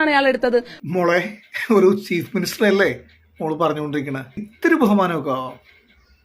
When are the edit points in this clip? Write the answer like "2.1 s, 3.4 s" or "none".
4.5 s